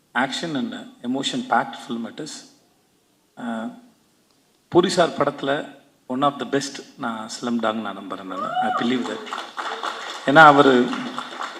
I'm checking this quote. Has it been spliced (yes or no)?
no